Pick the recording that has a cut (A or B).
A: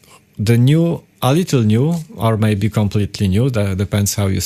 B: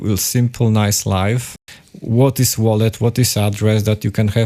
B